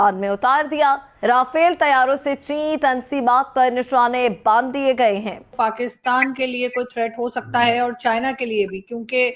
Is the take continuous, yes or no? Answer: no